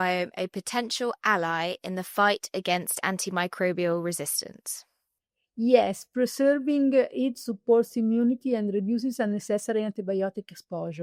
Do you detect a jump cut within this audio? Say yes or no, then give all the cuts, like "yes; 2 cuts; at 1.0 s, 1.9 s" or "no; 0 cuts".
no; 0 cuts